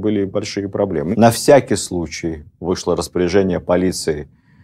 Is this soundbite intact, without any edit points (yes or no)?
no